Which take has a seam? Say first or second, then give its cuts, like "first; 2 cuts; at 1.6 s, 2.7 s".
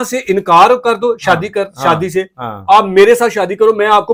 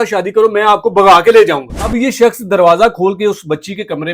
second; 1 cut; at 1.8 s